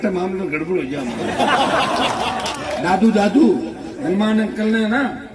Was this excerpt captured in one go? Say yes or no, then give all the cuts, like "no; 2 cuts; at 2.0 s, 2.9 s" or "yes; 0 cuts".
yes; 0 cuts